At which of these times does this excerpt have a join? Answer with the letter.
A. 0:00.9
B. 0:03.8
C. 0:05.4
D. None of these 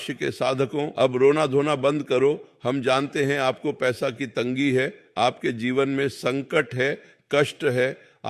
A